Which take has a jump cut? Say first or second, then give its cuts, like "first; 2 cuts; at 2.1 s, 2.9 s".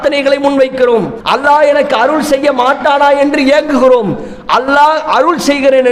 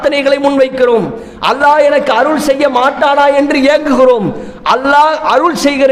first; 1 cut; at 1.2 s